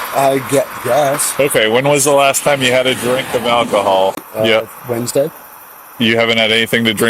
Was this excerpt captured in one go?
no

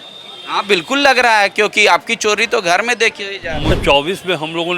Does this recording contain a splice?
yes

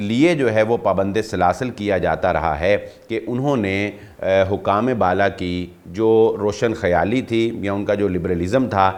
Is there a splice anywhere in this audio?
no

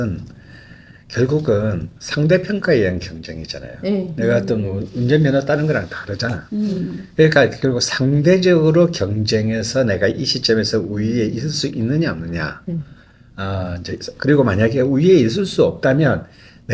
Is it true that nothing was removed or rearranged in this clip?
yes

